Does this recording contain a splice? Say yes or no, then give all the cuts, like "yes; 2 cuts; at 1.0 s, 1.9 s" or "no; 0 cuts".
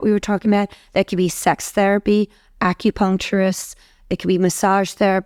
no; 0 cuts